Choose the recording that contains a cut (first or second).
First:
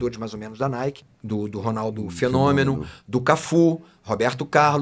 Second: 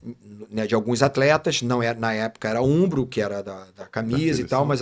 first